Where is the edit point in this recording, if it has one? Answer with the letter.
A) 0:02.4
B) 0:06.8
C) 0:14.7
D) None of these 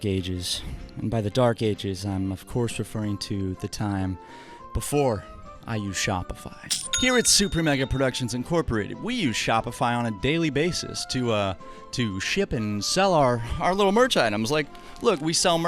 B